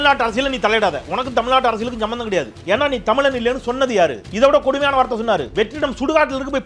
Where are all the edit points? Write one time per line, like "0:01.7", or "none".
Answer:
0:02.5
0:04.2
0:05.5